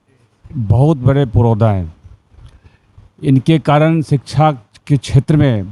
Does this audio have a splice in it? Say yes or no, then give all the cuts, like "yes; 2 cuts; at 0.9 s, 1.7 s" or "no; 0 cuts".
no; 0 cuts